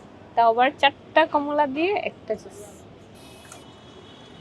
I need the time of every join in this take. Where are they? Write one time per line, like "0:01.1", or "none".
0:03.1